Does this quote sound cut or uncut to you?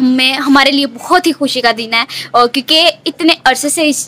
uncut